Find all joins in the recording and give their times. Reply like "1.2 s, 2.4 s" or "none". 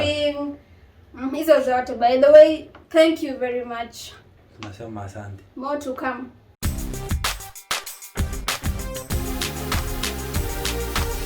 6.4 s